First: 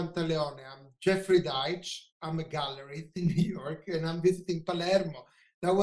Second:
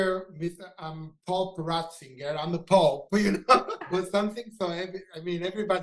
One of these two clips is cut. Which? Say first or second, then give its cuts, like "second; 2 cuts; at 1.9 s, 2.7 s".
second; 1 cut; at 3.9 s